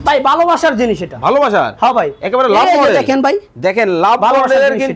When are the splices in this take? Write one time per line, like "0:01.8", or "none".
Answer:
none